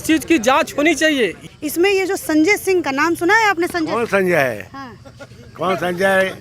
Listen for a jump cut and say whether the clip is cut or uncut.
cut